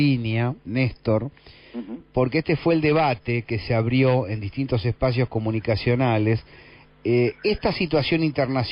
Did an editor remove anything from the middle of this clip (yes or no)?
yes